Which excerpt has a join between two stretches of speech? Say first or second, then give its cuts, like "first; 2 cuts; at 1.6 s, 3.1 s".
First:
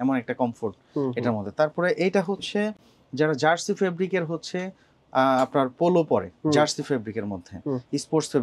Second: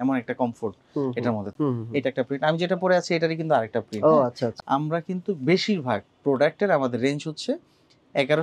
second; 2 cuts; at 1.5 s, 4.6 s